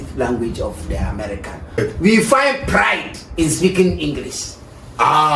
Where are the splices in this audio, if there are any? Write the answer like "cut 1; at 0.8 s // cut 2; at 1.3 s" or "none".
cut 1; at 1.8 s